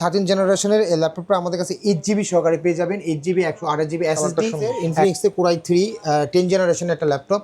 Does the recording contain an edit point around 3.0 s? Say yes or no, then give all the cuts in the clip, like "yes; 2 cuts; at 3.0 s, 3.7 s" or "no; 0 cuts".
no; 1 cut; at 4.8 s